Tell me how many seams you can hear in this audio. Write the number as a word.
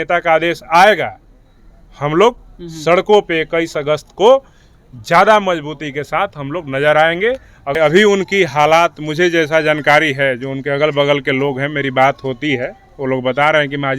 one